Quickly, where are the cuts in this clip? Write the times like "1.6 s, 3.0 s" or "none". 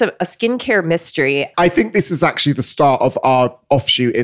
1.5 s